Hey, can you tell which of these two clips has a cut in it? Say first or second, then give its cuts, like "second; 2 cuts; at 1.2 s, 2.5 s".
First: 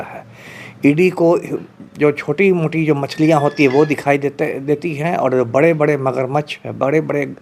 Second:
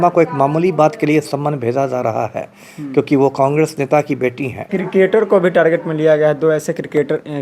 second; 1 cut; at 4.6 s